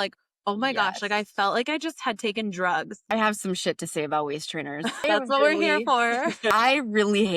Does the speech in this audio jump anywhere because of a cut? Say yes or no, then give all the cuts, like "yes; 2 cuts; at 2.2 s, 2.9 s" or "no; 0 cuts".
yes; 3 cuts; at 3.0 s, 5.0 s, 6.5 s